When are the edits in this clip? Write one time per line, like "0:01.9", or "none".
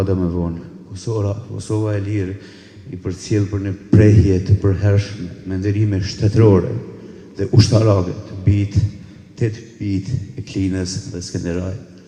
none